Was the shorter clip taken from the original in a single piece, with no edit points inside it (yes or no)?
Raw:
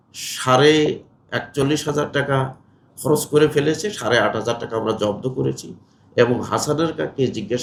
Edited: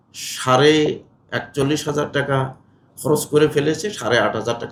yes